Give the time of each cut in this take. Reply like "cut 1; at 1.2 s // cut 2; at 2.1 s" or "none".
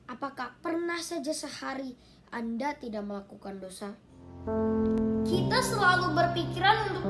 cut 1; at 4.3 s